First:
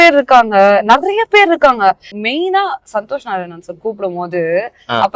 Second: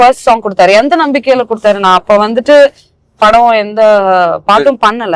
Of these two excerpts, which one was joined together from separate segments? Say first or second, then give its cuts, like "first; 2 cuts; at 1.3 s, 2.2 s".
first; 1 cut; at 2.1 s